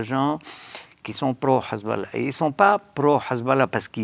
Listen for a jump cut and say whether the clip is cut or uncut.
uncut